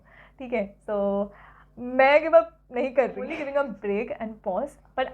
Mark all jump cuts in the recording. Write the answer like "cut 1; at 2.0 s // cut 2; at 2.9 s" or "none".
cut 1; at 3.4 s